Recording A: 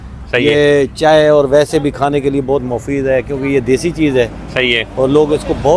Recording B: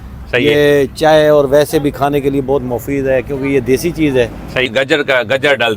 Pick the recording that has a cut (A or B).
B